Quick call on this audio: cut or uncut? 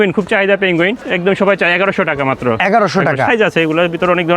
cut